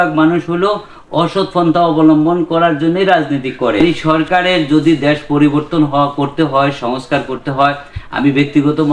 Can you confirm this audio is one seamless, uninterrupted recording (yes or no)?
no